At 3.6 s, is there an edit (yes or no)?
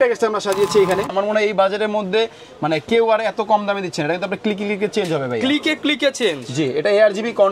no